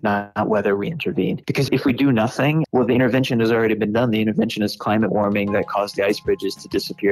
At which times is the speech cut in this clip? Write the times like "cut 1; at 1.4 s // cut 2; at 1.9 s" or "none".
cut 1; at 1.4 s // cut 2; at 2.7 s